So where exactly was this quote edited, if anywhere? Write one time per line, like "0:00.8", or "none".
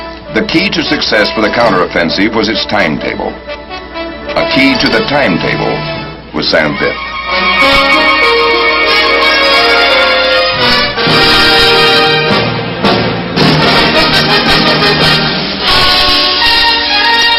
0:05.6